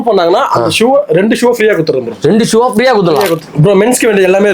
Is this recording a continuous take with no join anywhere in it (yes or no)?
no